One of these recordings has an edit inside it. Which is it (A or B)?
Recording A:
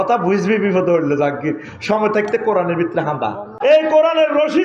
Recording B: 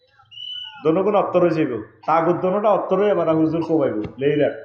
A